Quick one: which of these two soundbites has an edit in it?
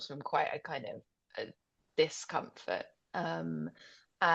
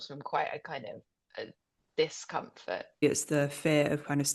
second; 1 cut; at 3.0 s

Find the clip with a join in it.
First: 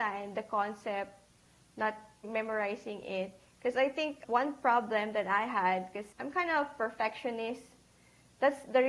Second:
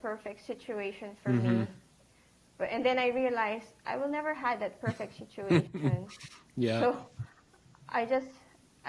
first; 3 cuts; at 2.3 s, 4.2 s, 6.0 s

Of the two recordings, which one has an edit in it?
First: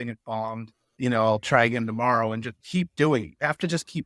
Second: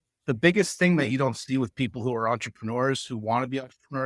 first; 1 cut; at 0.9 s

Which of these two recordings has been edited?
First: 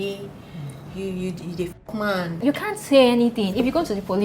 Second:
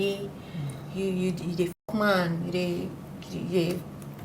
first; 1 cut; at 2.3 s

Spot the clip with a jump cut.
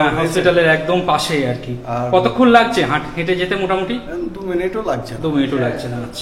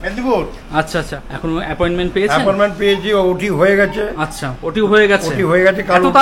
second; 1 cut; at 1.2 s

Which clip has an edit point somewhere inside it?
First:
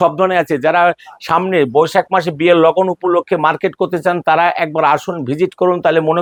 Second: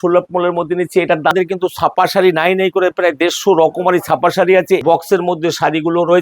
second; 2 cuts; at 1.3 s, 4.8 s

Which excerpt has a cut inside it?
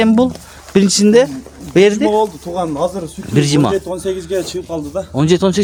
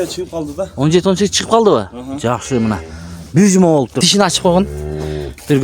second; 1 cut; at 4.0 s

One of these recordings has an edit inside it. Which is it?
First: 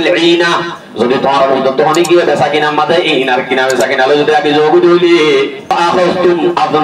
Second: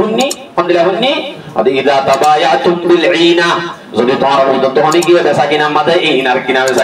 first; 1 cut; at 5.7 s

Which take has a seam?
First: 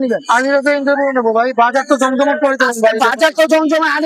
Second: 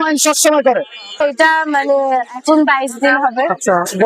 second; 1 cut; at 1.2 s

